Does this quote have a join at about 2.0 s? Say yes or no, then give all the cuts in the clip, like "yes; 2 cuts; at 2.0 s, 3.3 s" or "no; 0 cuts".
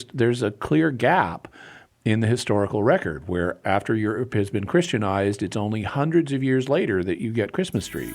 no; 1 cut; at 3.6 s